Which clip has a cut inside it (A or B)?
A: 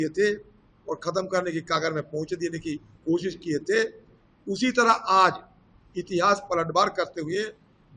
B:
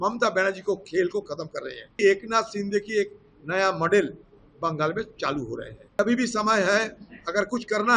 B